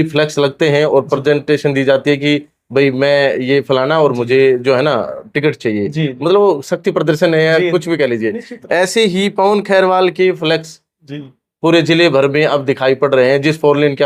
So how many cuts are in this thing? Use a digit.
0